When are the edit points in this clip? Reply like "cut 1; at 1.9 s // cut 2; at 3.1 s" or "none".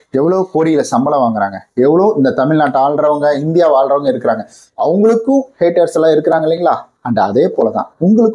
none